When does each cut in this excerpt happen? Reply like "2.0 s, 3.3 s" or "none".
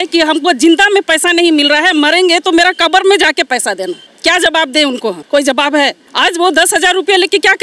4.0 s, 5.2 s, 6.0 s